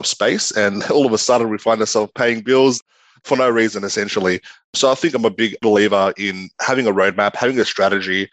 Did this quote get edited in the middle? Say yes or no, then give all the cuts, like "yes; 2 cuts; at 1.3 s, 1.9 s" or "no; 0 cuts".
yes; 1 cut; at 2.8 s